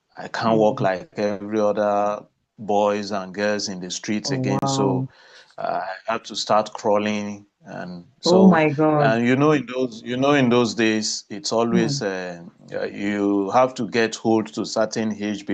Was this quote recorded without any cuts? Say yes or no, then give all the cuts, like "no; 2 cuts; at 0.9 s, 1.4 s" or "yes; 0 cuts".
yes; 0 cuts